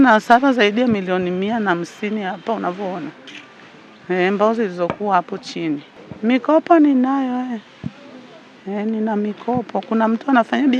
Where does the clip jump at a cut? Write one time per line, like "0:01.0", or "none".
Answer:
none